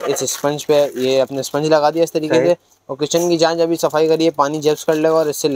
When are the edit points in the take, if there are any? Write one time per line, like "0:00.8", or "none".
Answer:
none